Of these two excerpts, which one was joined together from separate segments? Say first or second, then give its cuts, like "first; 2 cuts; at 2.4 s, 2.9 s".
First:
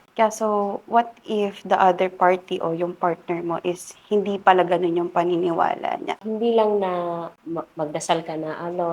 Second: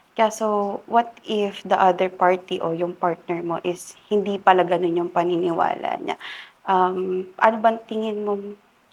first; 2 cuts; at 6.2 s, 7.4 s